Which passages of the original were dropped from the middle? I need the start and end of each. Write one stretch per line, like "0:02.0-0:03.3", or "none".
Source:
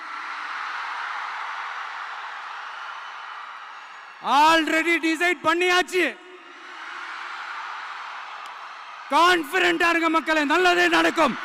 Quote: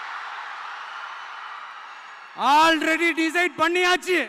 none